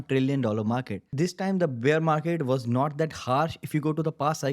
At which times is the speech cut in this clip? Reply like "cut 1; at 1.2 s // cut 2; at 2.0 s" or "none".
cut 1; at 1.1 s